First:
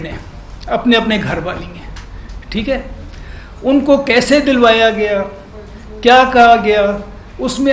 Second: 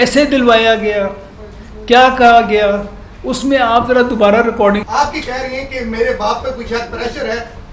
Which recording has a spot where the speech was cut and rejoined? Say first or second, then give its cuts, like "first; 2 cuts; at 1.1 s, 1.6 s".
second; 1 cut; at 4.8 s